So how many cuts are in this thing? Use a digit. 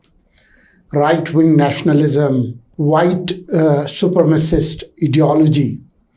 1